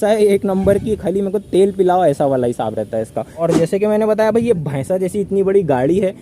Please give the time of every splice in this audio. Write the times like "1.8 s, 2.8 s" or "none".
3.3 s